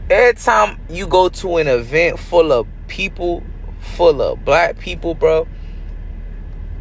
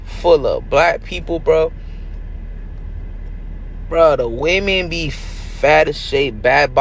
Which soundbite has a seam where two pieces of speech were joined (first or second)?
second